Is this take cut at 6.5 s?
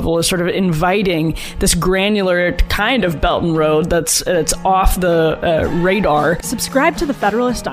yes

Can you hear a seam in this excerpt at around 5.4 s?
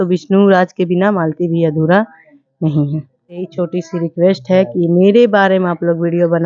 no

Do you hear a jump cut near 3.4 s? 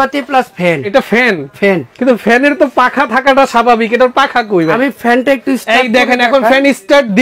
no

